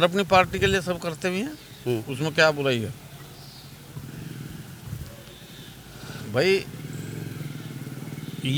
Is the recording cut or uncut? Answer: uncut